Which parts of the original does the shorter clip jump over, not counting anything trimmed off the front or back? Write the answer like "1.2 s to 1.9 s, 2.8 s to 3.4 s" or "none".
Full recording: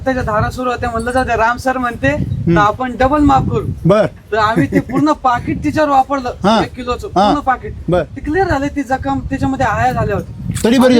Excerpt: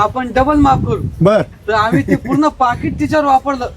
none

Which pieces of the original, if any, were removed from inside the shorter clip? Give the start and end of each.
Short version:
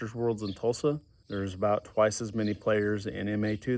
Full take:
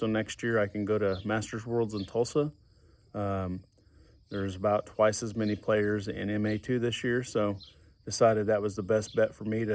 2.7 s to 4.2 s

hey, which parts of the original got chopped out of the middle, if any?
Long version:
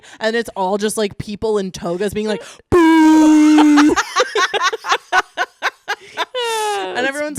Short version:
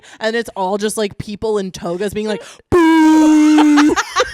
none

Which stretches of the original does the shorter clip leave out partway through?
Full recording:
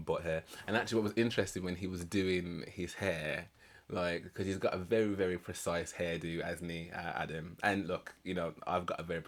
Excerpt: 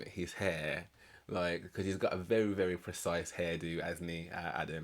none

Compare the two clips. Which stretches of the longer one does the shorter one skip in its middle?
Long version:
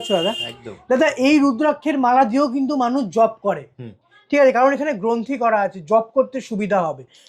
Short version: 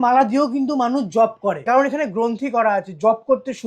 3.7 s to 4.5 s

